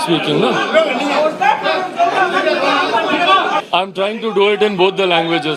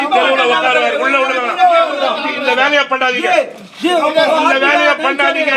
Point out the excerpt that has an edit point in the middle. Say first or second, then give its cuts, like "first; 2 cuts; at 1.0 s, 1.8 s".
first; 1 cut; at 3.6 s